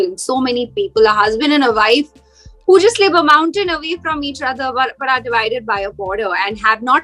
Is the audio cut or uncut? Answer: uncut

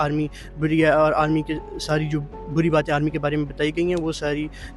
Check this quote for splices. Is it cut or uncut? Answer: uncut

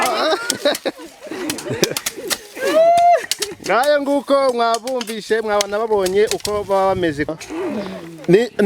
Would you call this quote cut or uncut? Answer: cut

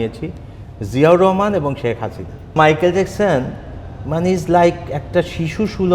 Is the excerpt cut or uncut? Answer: cut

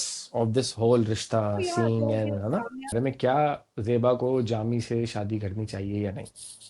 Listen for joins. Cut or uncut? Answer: cut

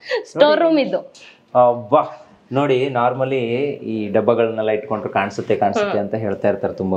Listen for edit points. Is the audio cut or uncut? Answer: uncut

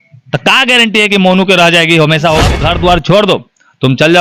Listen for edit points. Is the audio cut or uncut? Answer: cut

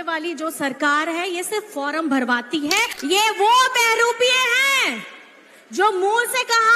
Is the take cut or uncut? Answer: cut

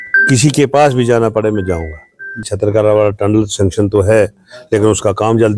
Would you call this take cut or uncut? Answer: cut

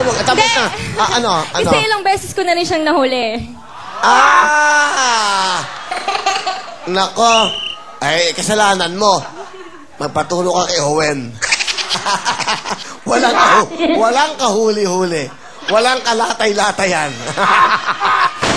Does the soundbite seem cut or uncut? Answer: cut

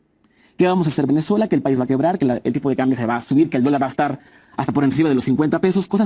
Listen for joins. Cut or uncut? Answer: uncut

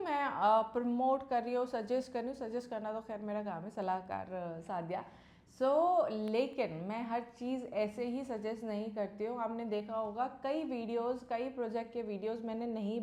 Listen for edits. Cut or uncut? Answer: uncut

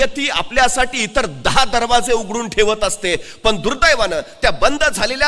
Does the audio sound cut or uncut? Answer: uncut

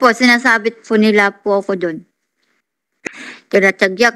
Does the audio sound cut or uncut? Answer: cut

